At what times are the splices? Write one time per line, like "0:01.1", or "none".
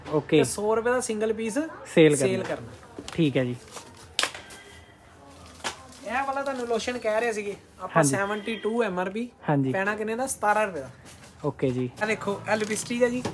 0:12.0